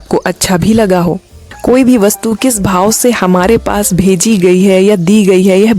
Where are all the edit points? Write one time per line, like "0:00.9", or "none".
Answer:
0:01.4